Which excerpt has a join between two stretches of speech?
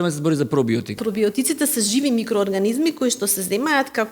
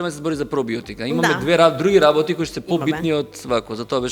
first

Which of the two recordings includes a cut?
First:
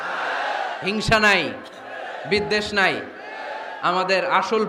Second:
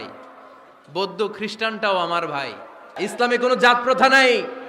second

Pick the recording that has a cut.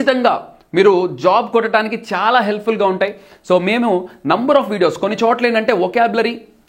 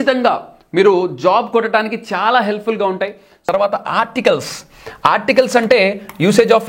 second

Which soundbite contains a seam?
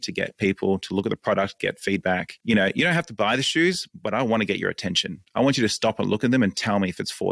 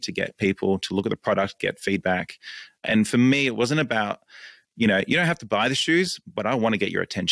first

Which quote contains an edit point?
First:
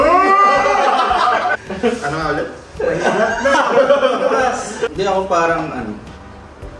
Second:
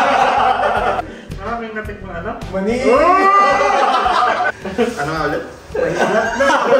first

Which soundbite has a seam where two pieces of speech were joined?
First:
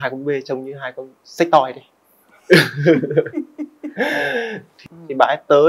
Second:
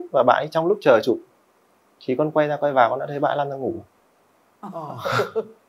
first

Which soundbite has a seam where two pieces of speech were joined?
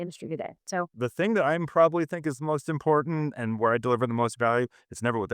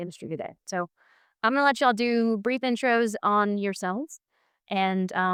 first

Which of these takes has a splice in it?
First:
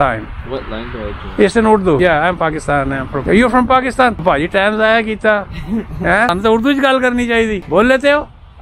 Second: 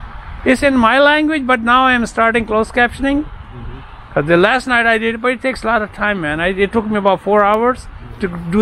first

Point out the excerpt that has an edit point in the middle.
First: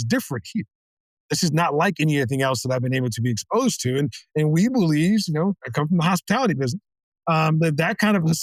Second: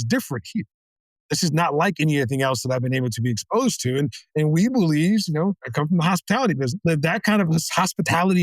second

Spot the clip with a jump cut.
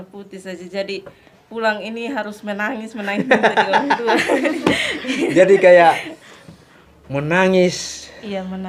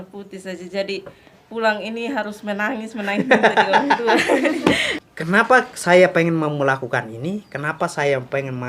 second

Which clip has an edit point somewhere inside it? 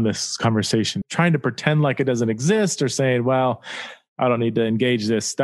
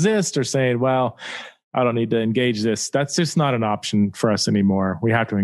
first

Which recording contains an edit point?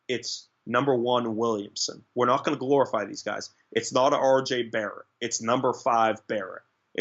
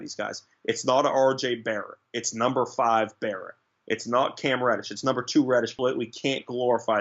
second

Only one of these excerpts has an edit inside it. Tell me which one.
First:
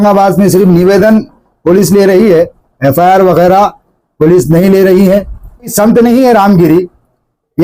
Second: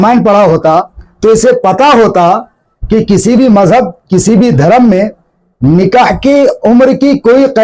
first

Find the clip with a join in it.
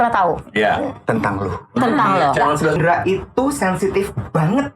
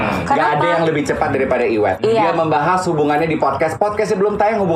first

